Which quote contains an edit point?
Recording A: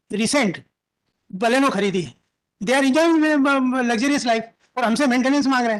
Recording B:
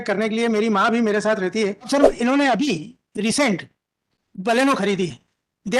B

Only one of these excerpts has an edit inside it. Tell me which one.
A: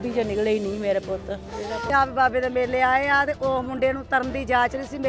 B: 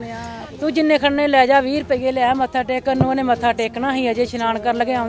A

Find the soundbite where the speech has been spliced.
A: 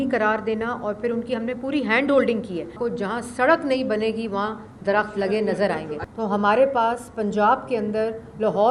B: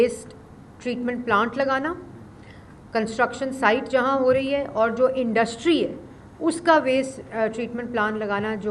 A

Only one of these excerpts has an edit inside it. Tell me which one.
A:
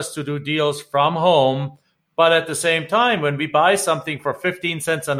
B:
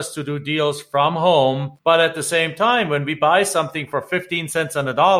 B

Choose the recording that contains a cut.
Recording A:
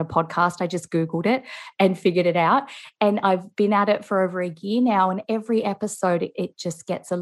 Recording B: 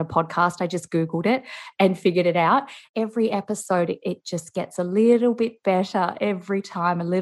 B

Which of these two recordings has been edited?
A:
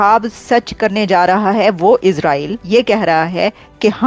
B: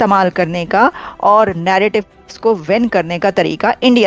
A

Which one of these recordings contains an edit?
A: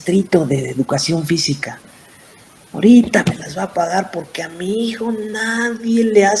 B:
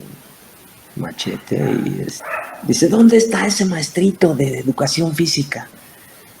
B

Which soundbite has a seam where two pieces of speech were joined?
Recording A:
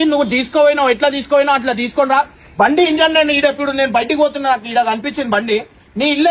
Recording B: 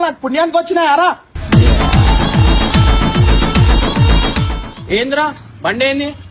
B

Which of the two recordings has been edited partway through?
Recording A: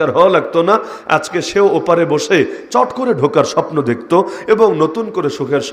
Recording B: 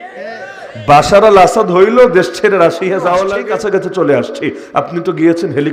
B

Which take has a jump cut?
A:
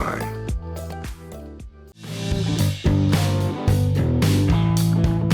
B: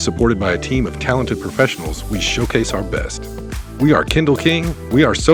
A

